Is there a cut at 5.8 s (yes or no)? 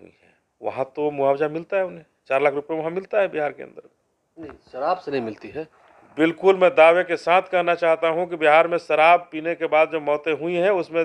no